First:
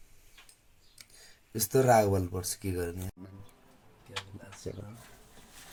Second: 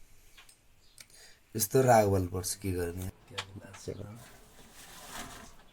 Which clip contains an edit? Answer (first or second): second